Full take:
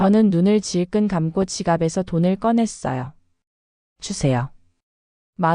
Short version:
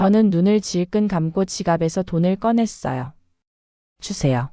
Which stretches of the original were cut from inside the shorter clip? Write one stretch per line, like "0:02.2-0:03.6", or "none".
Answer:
none

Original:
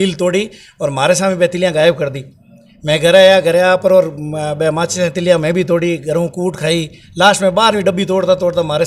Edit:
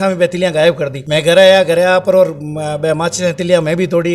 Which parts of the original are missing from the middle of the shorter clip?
0:02.1-0:02.7

